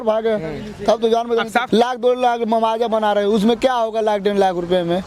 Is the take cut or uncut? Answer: cut